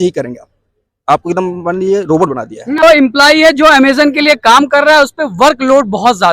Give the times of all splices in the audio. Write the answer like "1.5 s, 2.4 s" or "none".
2.8 s